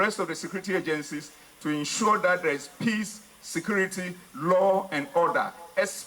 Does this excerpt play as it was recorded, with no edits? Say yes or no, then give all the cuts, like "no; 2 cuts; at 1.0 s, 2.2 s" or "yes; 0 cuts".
yes; 0 cuts